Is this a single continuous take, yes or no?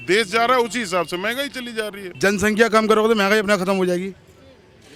yes